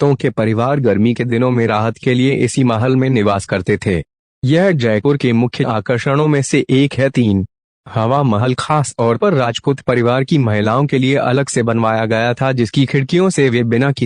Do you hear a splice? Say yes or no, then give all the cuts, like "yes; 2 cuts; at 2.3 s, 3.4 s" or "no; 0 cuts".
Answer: yes; 1 cut; at 2.0 s